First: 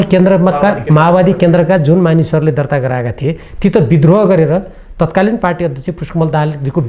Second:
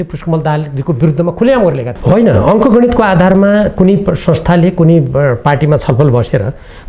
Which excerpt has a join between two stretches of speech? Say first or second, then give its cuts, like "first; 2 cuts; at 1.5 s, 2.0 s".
second; 1 cut; at 1.9 s